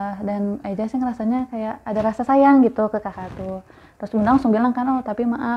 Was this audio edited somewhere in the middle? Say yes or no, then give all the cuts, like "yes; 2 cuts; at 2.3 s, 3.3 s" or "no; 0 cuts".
no; 0 cuts